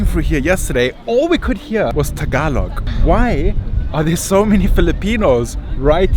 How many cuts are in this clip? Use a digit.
2